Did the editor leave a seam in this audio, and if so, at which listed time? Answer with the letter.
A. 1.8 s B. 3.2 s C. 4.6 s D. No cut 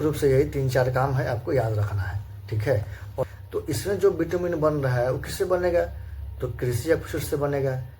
B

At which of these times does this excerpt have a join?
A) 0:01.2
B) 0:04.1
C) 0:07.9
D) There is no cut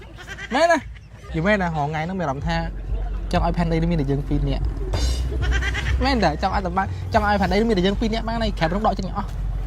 A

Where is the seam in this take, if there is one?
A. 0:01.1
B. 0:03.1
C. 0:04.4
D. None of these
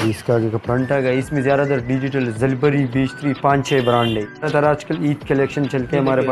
C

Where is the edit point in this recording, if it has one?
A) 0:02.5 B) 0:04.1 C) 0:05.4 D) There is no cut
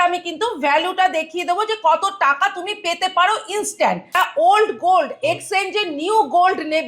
B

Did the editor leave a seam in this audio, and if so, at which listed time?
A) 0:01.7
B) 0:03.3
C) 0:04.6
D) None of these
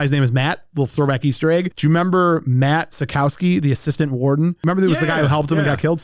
C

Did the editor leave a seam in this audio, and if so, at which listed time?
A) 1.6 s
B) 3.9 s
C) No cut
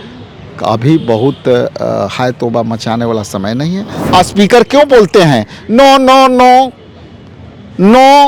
B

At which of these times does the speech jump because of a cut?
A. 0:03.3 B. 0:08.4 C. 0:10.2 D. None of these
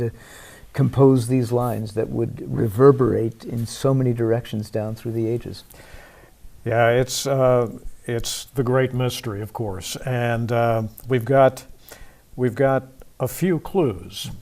B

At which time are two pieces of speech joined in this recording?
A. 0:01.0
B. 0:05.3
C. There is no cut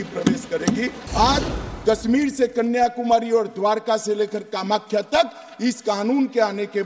A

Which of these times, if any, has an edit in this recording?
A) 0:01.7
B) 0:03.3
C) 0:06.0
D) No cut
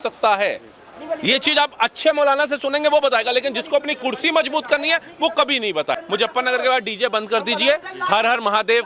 C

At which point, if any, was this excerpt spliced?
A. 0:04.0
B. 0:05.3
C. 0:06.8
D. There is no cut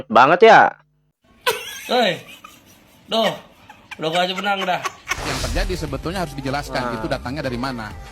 B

